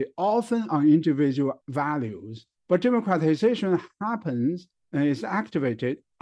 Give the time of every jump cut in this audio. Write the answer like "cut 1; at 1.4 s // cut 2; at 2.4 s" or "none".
cut 1; at 1.6 s